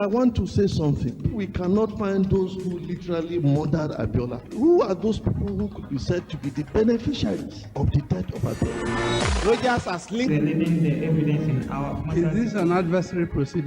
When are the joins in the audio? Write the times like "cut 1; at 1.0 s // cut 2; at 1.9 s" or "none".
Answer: cut 1; at 1.3 s // cut 2; at 10.3 s